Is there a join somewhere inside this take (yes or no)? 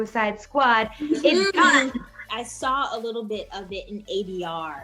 yes